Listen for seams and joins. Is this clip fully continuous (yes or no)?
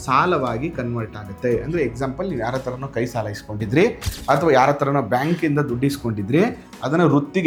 yes